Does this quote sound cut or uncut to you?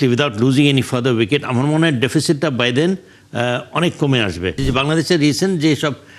cut